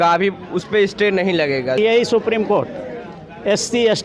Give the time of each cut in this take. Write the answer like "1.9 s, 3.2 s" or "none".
1.8 s